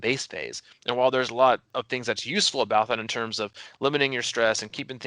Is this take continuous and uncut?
no; 1 cut; at 1.7 s

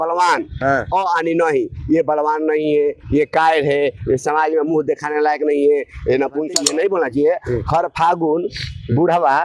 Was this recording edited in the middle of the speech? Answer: yes; 1 cut; at 6.6 s

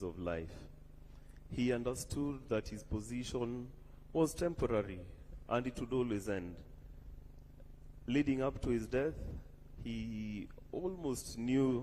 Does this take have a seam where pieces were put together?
yes; 1 cut; at 5.9 s

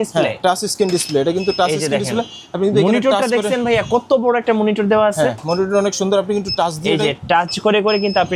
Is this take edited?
no; 0 cuts

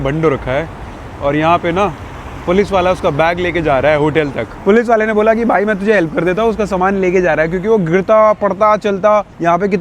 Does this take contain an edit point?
yes; 1 cut; at 4.6 s

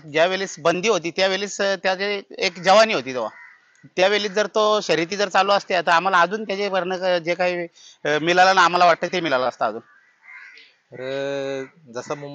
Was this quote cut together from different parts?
no; 0 cuts

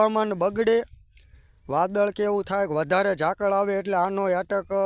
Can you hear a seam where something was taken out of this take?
no; 0 cuts

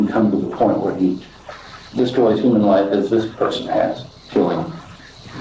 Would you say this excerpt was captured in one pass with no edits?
no; 1 cut; at 4.2 s

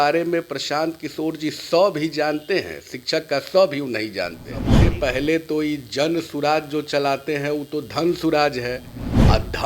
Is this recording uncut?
no; 1 cut; at 4.7 s

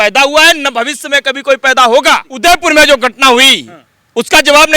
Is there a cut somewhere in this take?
yes; 1 cut; at 2.3 s

